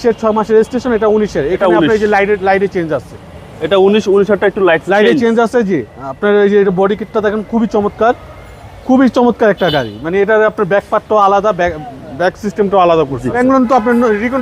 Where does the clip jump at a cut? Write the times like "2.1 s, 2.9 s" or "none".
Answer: 13.4 s